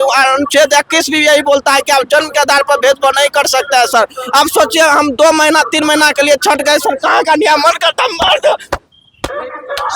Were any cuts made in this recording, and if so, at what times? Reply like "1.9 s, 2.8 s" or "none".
none